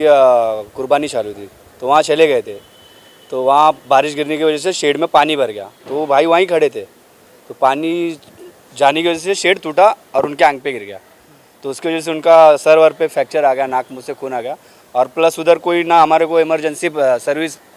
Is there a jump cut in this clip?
no; 0 cuts

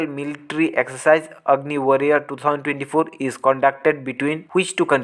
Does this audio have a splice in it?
no; 0 cuts

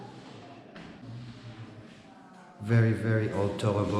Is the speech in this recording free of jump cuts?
no; 1 cut; at 1.0 s

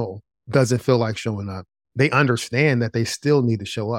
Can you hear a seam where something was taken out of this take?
yes; 1 cut; at 2.2 s

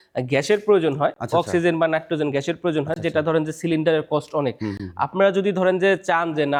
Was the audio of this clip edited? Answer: no; 0 cuts

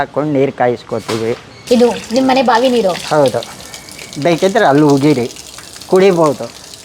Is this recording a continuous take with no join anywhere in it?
no; 1 cut; at 1.5 s

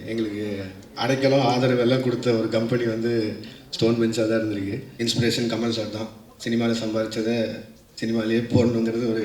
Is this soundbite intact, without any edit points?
no; 1 cut; at 4.9 s

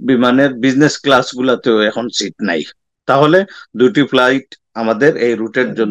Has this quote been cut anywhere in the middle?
no; 0 cuts

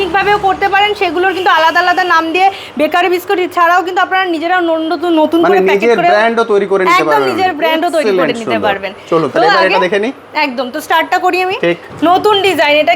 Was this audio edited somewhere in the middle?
yes; 1 cut; at 11.9 s

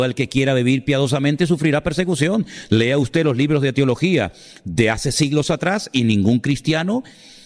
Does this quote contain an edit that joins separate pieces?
no; 0 cuts

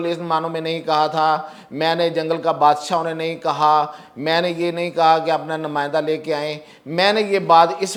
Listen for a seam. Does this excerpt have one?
no; 0 cuts

